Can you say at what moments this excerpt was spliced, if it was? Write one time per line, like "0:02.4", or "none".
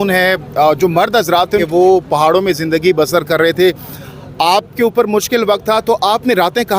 0:01.6